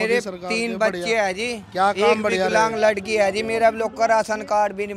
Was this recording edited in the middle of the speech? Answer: no; 0 cuts

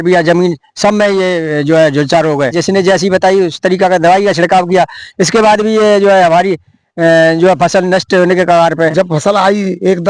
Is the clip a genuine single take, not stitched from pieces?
no; 2 cuts; at 2.6 s, 8.9 s

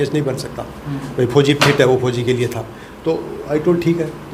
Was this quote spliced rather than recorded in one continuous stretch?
no; 0 cuts

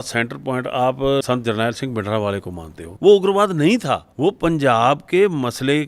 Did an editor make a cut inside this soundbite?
yes; 3 cuts; at 1.2 s, 2.8 s, 4.1 s

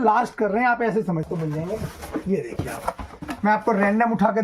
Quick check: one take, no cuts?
no; 1 cut; at 1.3 s

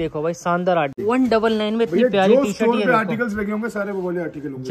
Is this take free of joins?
no; 1 cut; at 1.0 s

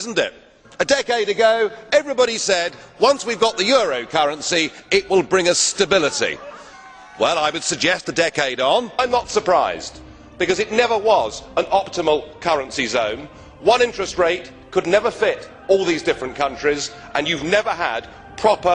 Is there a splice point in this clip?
no; 0 cuts

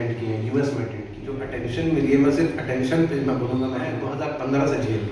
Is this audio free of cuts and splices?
no; 2 cuts; at 1.5 s, 4.1 s

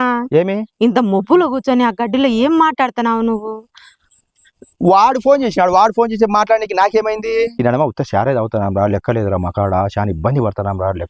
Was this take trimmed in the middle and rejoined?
yes; 1 cut; at 7.5 s

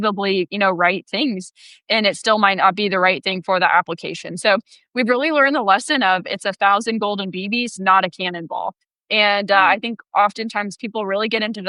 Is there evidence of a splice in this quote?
no; 0 cuts

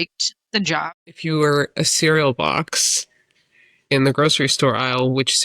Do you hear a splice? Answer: yes; 1 cut; at 1.0 s

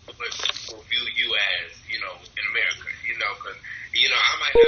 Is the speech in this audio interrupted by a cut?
no; 0 cuts

